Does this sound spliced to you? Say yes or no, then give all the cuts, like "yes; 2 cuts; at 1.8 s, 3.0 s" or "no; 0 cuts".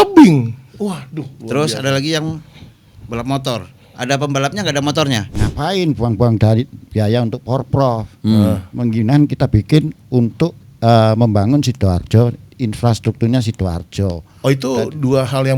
yes; 1 cut; at 5.4 s